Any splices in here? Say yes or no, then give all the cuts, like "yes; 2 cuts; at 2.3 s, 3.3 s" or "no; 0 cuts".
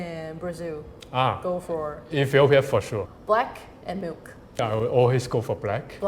yes; 2 cuts; at 3.1 s, 4.6 s